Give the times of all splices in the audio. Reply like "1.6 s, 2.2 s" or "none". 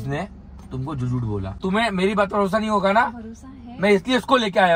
1.5 s

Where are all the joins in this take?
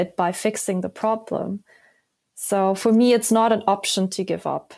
none

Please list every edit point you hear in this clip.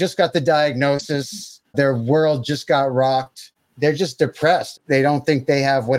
1.7 s, 3.5 s

